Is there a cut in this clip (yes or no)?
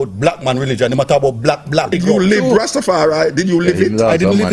yes